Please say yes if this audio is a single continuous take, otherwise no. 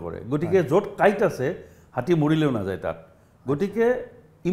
yes